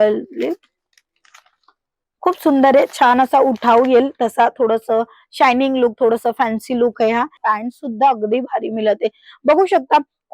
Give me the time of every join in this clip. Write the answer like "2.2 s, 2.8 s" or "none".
7.4 s